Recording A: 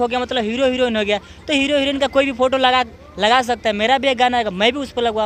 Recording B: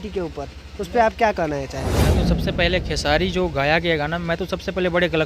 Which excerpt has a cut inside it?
B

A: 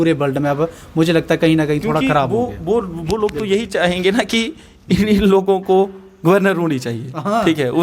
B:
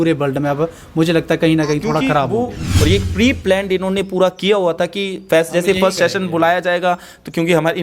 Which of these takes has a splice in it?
B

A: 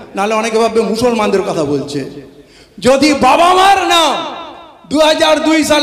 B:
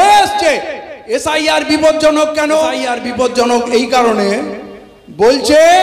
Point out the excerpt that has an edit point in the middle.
B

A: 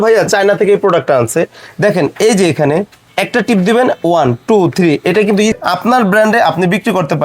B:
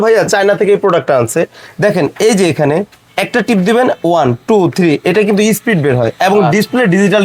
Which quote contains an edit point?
A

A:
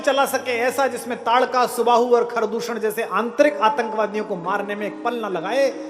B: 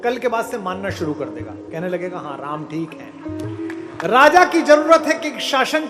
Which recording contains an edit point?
B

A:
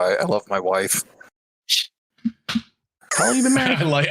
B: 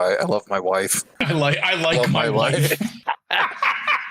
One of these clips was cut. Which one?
B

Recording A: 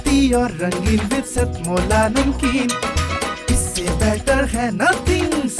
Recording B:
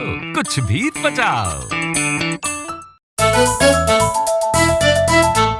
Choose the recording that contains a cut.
B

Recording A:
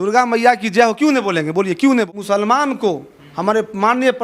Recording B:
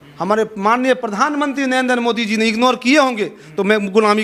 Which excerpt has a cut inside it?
A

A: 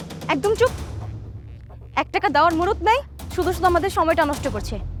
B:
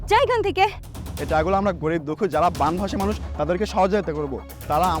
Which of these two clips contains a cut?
B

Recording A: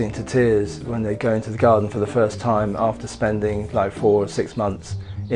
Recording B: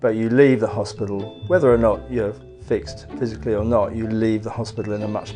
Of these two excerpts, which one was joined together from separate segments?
B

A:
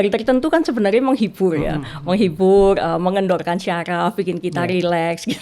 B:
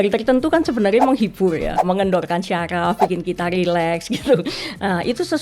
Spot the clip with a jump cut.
B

